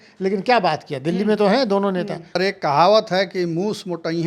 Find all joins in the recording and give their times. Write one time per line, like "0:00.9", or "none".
0:02.4